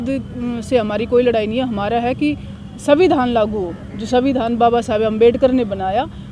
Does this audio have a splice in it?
no; 0 cuts

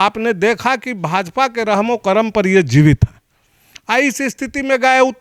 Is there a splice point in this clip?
no; 0 cuts

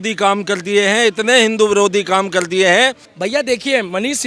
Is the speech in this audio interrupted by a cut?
yes; 1 cut; at 3.1 s

